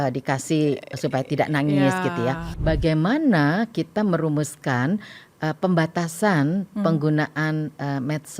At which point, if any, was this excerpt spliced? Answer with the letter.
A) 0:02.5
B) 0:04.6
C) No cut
A